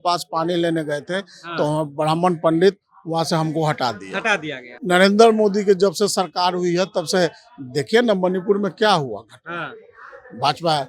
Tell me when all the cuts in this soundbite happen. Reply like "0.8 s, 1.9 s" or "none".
4.8 s